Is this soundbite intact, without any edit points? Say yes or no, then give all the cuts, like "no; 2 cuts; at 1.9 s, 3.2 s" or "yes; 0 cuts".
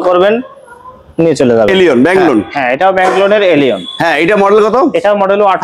no; 1 cut; at 1.7 s